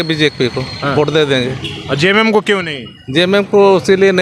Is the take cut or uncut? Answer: uncut